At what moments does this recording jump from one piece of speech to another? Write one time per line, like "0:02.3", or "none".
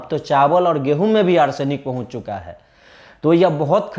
none